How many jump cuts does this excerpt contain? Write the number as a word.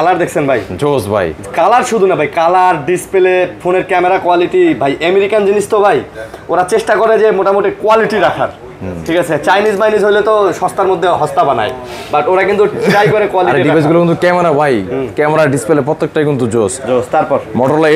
zero